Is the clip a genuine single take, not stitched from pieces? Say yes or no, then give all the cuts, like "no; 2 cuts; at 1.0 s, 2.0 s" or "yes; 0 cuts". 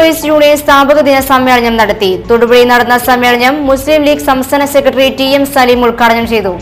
yes; 0 cuts